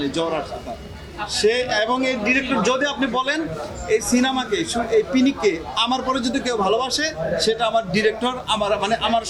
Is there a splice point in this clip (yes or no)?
no